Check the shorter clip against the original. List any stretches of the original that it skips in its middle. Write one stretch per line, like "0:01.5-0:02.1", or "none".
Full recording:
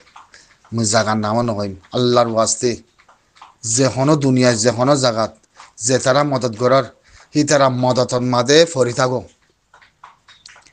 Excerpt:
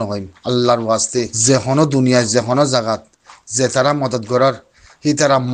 0:02.8-0:03.6